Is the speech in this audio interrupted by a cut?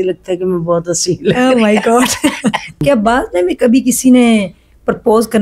yes; 1 cut; at 2.8 s

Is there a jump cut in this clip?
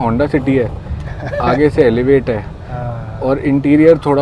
no; 0 cuts

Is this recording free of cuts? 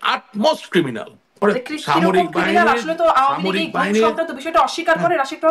no; 1 cut; at 1.4 s

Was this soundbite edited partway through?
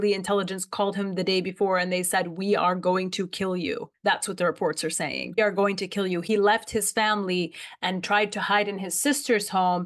no; 0 cuts

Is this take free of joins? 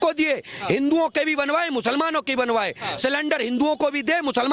yes; 0 cuts

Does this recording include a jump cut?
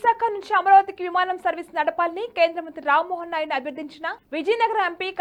no; 0 cuts

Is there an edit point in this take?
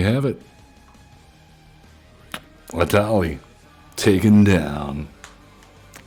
no; 0 cuts

